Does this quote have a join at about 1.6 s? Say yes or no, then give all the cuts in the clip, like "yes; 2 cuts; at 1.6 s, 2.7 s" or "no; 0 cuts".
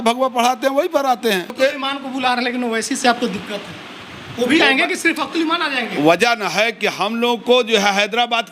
yes; 1 cut; at 1.6 s